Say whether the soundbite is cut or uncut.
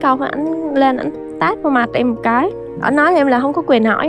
uncut